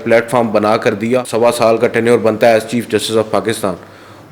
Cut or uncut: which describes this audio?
cut